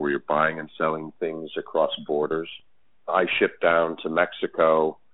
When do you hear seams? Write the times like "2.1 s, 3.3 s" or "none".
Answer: none